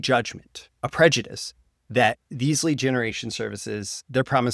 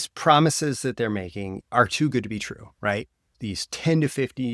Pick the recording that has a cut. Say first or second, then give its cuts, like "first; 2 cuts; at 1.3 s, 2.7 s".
second; 2 cuts; at 1.6 s, 3.3 s